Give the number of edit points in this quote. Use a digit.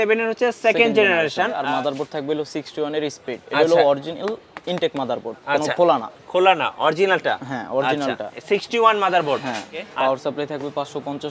2